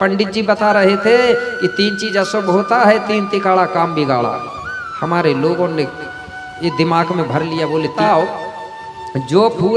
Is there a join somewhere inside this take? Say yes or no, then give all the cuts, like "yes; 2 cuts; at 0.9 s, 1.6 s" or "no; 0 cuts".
yes; 1 cut; at 8.0 s